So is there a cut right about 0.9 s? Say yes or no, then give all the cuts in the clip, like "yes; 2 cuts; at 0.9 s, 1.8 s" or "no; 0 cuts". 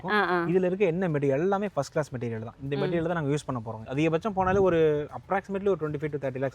no; 1 cut; at 3.8 s